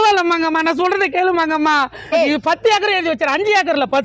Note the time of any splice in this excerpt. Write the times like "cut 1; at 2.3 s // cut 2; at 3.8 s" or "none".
cut 1; at 2.1 s